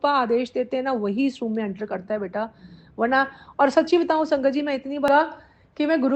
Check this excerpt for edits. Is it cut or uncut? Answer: cut